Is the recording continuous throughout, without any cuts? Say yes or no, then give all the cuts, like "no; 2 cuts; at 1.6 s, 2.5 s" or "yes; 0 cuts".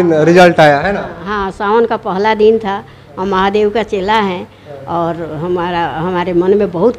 yes; 0 cuts